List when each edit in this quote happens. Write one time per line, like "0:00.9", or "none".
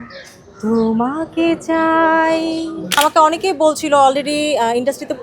0:03.0